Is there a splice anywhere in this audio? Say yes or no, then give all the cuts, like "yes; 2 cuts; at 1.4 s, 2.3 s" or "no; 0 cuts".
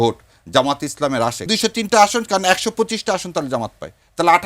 yes; 1 cut; at 1.4 s